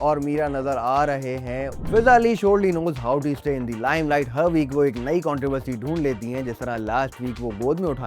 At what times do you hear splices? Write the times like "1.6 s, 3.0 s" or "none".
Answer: 1.8 s